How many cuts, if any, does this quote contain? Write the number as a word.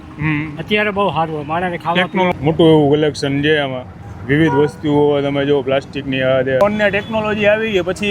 two